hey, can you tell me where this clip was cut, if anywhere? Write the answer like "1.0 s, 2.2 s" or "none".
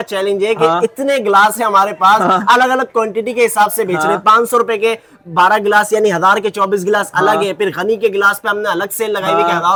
none